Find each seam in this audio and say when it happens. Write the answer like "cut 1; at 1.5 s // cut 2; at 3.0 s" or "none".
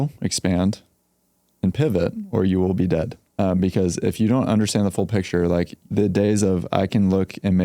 cut 1; at 3.2 s // cut 2; at 5.8 s

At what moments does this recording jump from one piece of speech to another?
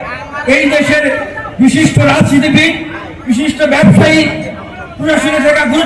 none

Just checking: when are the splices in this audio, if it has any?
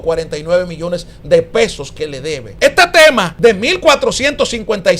cut 1; at 2.5 s // cut 2; at 3.3 s

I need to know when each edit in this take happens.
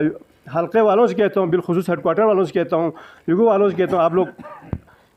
none

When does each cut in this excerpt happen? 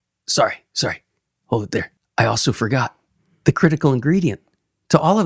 cut 1; at 2.0 s

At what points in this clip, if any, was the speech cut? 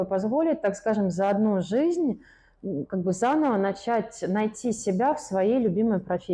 none

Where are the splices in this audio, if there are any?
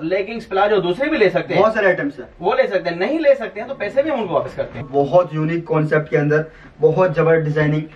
cut 1; at 4.9 s

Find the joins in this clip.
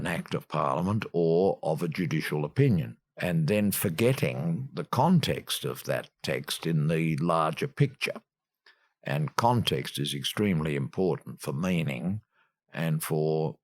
cut 1; at 3.0 s

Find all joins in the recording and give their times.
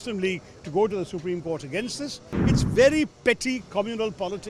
cut 1; at 2.3 s

